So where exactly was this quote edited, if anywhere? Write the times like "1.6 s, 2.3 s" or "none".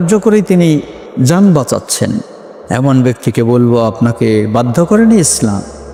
none